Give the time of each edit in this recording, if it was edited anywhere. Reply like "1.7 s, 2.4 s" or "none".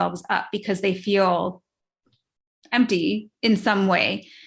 none